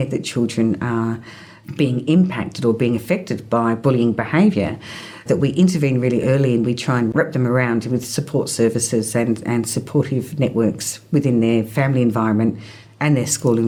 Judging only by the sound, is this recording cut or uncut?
uncut